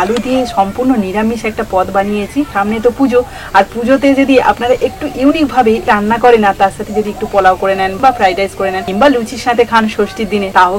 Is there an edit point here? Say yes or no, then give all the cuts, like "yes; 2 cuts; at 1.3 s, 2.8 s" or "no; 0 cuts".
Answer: yes; 4 cuts; at 2.5 s, 5.9 s, 7.9 s, 8.8 s